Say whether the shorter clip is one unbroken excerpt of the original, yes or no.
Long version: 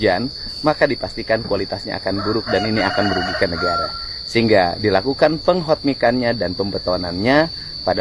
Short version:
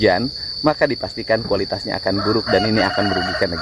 yes